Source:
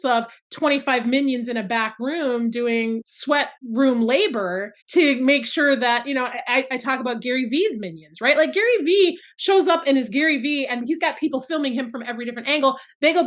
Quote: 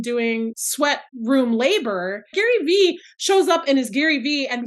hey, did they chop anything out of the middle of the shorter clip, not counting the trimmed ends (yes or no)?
yes